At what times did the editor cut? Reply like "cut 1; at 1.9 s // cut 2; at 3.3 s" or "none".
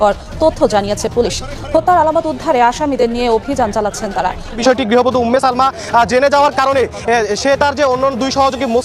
cut 1; at 4.6 s